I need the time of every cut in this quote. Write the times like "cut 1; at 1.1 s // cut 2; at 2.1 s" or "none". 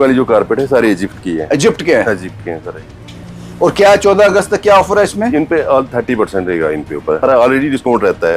cut 1; at 7.2 s